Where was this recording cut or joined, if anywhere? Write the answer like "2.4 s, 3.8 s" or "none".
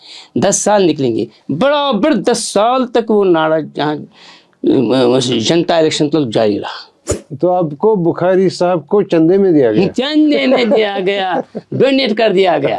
7.2 s

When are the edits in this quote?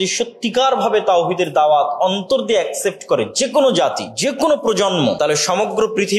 4.1 s, 5.2 s

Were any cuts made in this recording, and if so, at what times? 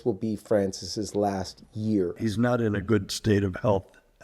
2.2 s

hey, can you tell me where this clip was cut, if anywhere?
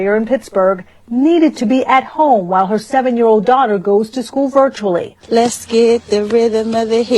5.4 s

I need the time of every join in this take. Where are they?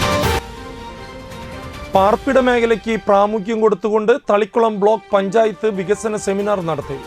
1.2 s

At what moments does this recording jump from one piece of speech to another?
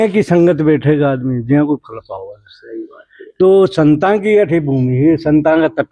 none

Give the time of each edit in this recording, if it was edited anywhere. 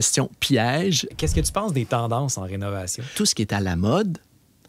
1.1 s, 3.0 s

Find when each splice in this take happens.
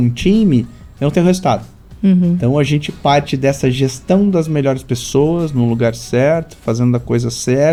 none

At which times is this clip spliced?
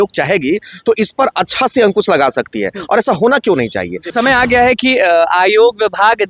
4.1 s

